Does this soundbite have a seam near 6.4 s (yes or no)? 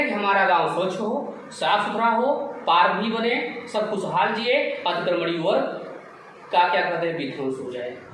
no